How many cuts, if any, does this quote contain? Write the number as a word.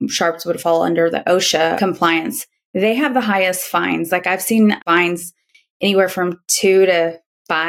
two